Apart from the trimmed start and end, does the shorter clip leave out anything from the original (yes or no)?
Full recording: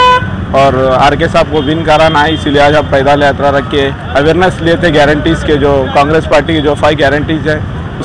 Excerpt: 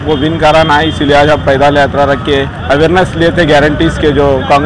no